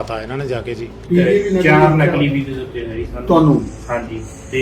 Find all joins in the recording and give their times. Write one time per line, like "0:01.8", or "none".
0:01.0